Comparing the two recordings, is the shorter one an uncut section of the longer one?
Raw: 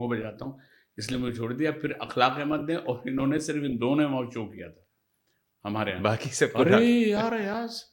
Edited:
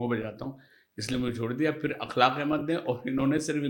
yes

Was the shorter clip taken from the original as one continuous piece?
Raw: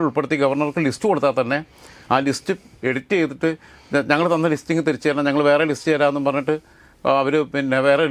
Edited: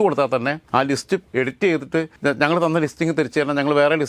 no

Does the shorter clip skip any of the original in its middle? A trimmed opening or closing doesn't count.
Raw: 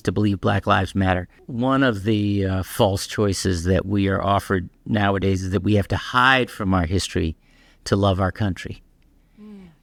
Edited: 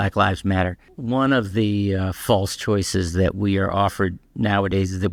no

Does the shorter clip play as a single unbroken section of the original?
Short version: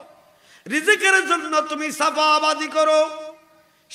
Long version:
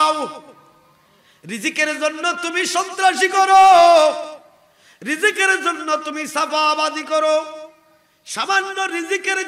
yes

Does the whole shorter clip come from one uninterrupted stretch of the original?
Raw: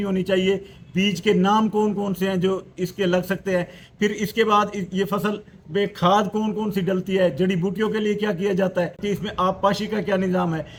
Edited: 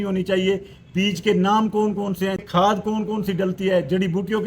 no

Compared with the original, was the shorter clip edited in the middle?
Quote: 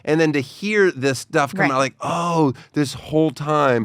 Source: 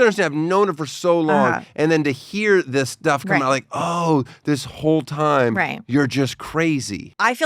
no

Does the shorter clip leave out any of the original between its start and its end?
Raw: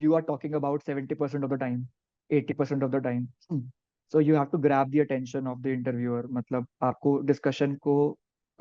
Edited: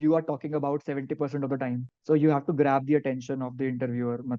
yes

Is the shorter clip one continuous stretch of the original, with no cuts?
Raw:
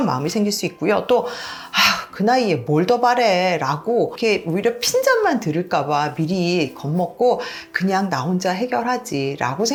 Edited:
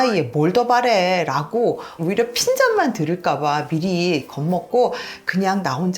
no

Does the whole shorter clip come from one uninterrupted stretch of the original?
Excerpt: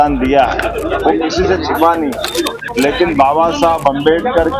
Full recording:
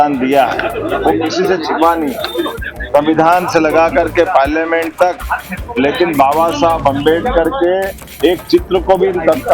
no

